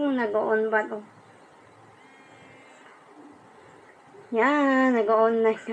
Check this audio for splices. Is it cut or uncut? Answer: uncut